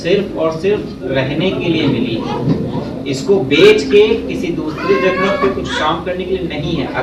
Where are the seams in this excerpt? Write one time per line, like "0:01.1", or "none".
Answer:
none